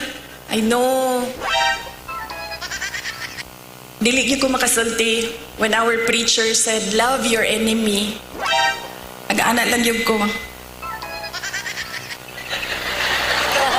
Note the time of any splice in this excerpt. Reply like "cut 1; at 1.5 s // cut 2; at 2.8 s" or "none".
none